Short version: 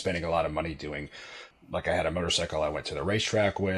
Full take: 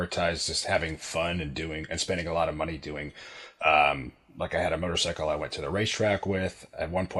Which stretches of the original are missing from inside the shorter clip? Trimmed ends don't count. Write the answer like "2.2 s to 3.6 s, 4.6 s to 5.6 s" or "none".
3.5 s to 4.1 s